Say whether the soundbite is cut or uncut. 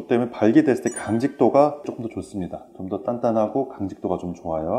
cut